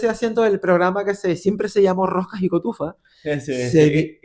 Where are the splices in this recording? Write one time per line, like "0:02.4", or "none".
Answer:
none